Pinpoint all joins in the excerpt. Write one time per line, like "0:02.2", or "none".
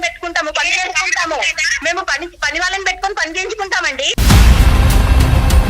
0:04.1